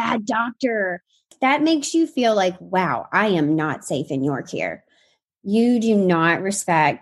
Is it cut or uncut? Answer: cut